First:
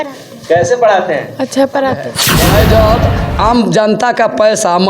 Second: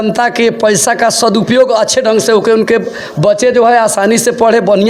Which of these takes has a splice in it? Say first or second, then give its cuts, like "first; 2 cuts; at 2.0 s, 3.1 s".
first; 1 cut; at 2.1 s